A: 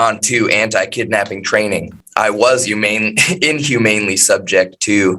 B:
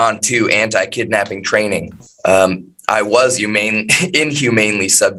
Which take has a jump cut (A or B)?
A